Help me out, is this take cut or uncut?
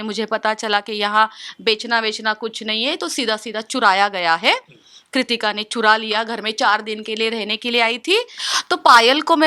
cut